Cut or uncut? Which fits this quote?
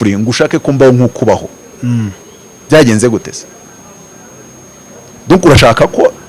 uncut